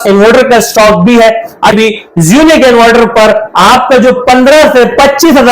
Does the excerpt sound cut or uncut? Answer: cut